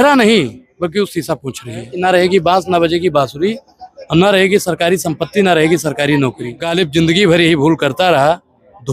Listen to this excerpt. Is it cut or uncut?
cut